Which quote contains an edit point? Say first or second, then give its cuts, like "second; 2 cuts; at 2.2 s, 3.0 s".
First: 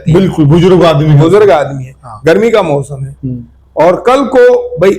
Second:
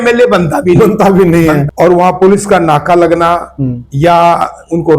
second; 1 cut; at 1.6 s